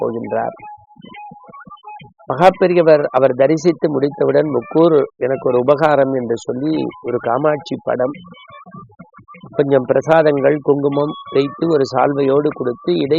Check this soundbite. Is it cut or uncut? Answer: uncut